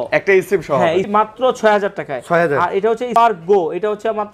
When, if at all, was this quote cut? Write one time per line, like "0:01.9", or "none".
0:01.1
0:03.1